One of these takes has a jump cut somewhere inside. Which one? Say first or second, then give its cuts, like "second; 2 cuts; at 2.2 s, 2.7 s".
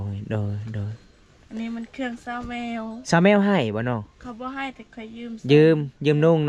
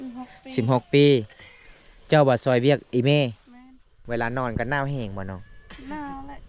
second; 1 cut; at 4.0 s